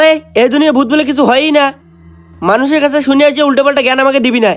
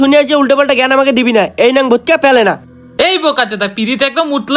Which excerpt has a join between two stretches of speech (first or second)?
second